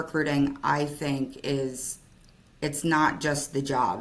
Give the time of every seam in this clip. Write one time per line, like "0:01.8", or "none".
none